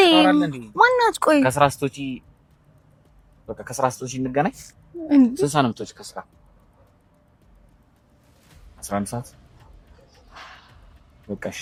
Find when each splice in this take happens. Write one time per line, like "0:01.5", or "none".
none